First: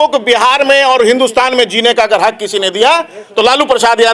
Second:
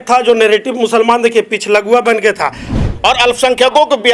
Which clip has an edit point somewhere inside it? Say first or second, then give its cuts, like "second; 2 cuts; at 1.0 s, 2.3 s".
second; 1 cut; at 2.7 s